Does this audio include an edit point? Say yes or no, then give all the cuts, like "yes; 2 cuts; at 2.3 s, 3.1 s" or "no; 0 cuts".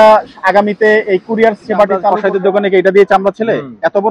yes; 1 cut; at 2.1 s